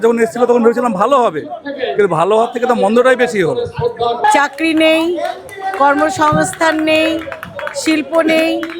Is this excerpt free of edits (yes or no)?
no